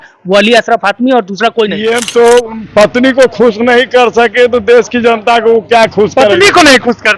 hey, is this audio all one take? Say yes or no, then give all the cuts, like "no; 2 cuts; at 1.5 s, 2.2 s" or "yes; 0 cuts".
no; 1 cut; at 1.8 s